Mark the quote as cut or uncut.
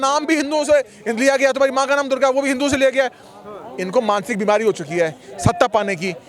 uncut